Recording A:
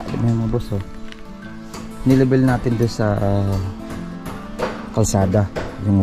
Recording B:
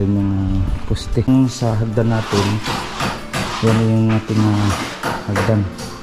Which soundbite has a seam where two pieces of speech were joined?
B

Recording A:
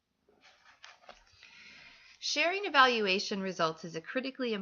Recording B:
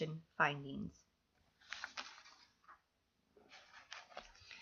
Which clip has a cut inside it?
A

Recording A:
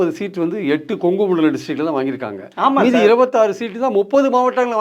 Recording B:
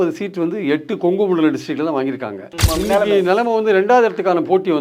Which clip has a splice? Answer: B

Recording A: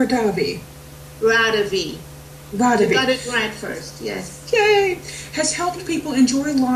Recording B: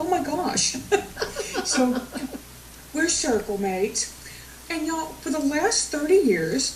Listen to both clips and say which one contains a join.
B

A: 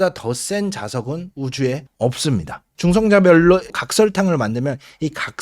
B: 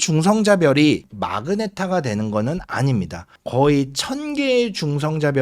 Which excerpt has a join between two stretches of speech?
A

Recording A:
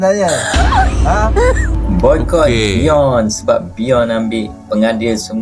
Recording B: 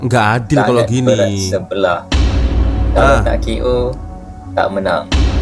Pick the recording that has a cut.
A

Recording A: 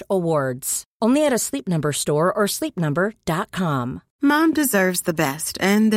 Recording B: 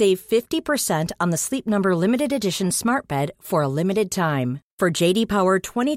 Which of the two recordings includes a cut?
A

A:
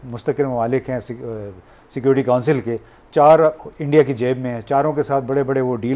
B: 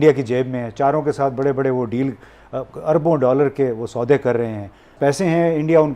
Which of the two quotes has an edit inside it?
B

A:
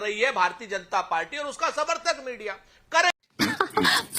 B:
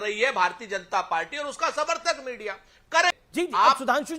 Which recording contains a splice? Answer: B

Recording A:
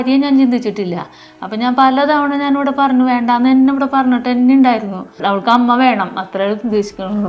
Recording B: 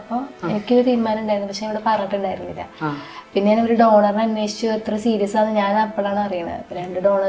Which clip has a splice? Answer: A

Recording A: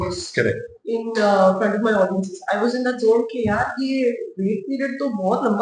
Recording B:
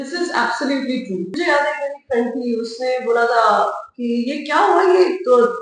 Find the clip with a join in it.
B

